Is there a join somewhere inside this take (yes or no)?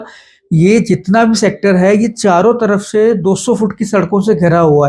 no